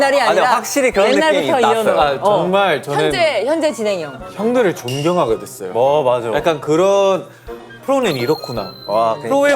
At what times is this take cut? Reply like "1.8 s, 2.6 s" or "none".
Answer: 7.7 s